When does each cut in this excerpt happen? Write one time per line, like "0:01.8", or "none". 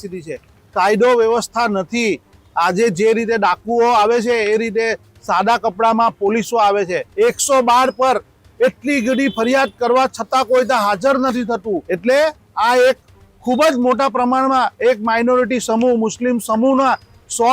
0:07.0
0:11.9